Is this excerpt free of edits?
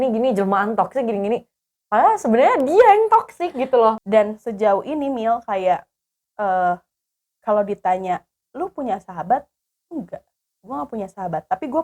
no; 1 cut; at 4.0 s

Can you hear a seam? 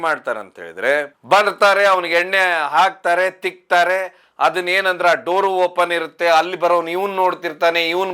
no; 0 cuts

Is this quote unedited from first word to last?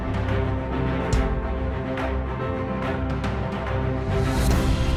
yes; 0 cuts

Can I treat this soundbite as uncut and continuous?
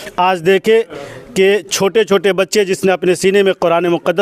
yes; 0 cuts

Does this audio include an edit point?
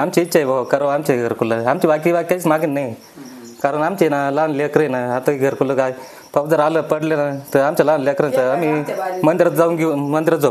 no; 0 cuts

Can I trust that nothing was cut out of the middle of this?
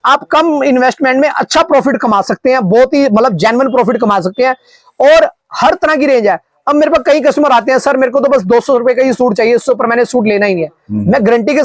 yes; 0 cuts

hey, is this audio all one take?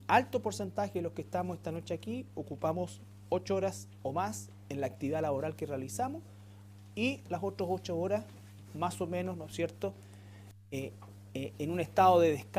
yes; 0 cuts

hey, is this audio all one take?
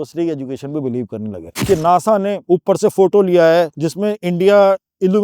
no; 3 cuts; at 1.5 s, 2.4 s, 3.8 s

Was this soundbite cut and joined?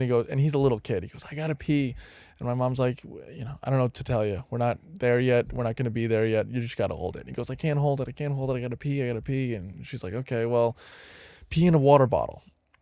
no; 0 cuts

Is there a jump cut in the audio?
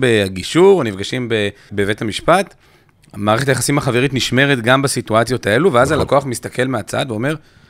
yes; 1 cut; at 1.7 s

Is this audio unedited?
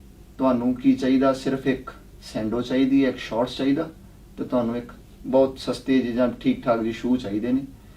yes; 0 cuts

